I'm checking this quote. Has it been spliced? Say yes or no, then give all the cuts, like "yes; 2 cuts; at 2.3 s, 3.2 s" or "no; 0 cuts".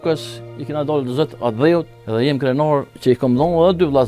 yes; 2 cuts; at 2.0 s, 3.0 s